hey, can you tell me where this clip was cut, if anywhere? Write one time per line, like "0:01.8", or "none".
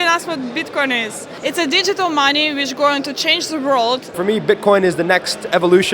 0:01.3
0:04.2

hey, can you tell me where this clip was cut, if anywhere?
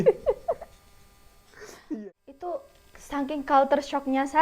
0:02.0

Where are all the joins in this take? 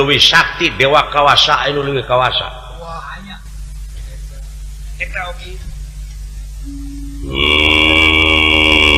none

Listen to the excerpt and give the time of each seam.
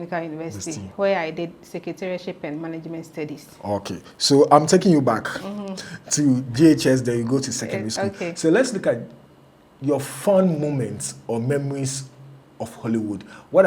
none

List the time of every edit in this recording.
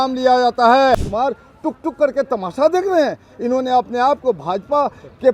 0:01.1

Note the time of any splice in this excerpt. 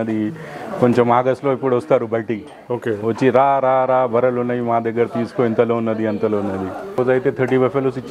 0:07.0

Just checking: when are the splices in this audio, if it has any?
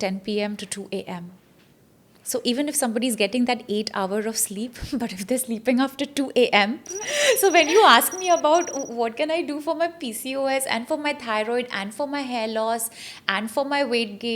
0:07.0

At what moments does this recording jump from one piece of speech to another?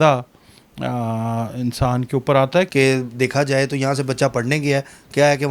0:02.7

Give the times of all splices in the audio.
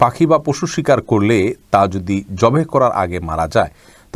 none

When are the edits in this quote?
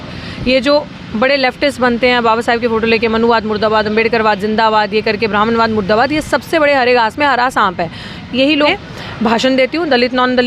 0:08.7

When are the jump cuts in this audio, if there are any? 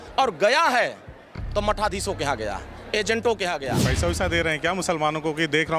0:03.9

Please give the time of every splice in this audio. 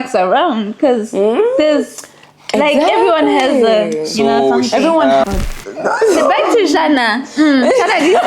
0:05.3

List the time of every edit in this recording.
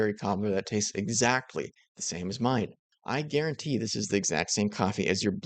0:02.9

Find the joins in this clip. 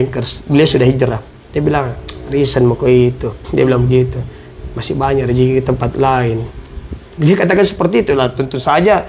none

